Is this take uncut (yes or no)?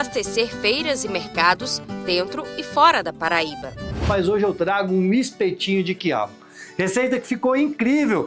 no